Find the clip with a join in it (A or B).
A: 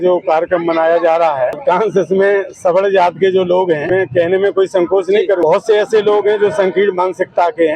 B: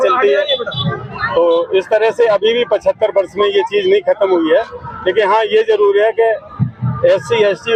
A